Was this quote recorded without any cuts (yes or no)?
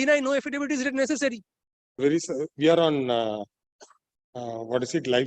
no